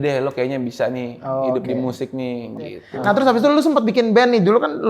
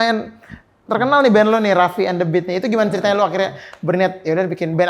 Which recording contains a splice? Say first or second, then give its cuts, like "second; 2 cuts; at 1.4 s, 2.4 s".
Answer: first; 1 cut; at 3.1 s